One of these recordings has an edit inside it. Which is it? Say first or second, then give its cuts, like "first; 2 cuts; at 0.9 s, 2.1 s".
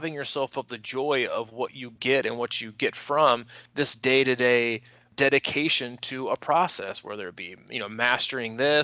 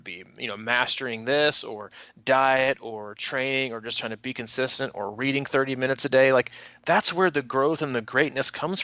first; 1 cut; at 5.1 s